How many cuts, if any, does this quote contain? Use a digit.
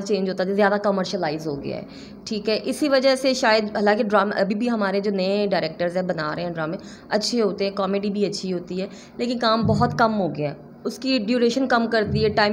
0